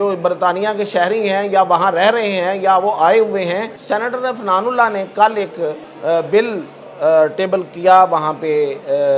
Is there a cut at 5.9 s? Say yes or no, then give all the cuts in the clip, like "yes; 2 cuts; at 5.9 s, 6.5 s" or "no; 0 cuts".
yes; 2 cuts; at 3.7 s, 5.9 s